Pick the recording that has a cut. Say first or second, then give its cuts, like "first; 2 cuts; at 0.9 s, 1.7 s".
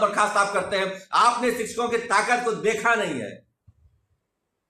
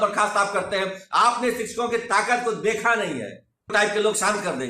second; 1 cut; at 3.7 s